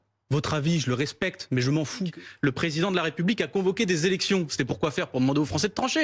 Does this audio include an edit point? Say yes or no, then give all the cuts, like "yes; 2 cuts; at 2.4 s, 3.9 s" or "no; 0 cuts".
yes; 1 cut; at 2.1 s